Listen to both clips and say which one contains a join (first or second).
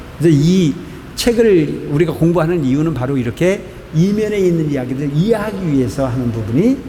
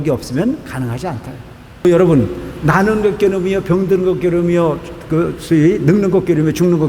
second